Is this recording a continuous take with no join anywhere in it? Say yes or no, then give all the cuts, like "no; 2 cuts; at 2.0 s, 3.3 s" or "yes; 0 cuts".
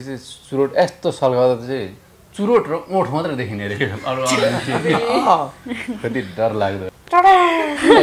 no; 1 cut; at 6.9 s